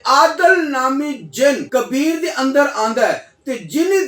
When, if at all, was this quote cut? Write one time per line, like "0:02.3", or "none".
0:01.6